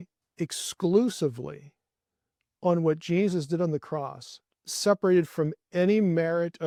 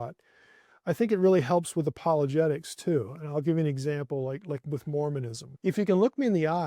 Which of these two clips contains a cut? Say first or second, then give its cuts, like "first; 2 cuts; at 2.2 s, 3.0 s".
second; 1 cut; at 5.4 s